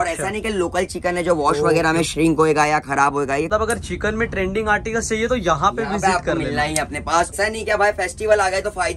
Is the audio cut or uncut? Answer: cut